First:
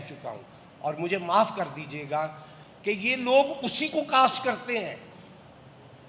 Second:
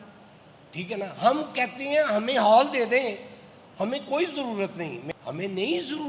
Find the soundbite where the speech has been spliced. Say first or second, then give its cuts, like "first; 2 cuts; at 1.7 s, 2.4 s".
second; 1 cut; at 5.0 s